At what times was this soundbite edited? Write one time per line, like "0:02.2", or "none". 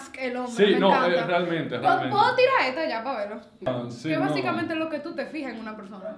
0:03.7